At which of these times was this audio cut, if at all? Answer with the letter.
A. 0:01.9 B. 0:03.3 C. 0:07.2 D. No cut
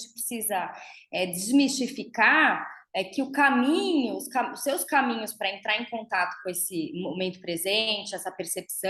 D